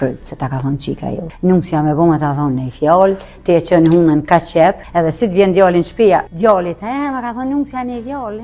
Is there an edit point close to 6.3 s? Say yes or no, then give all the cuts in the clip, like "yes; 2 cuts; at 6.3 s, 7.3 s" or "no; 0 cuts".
yes; 3 cuts; at 1.3 s, 4.8 s, 6.3 s